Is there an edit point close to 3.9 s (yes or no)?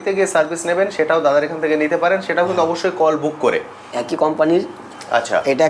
yes